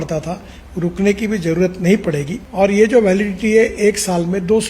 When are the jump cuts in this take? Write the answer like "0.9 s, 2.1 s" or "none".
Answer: 2.4 s